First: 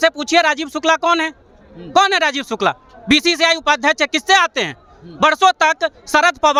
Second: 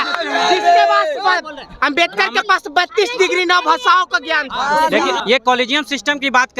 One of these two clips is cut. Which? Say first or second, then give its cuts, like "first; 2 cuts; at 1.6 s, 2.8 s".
second; 1 cut; at 5.2 s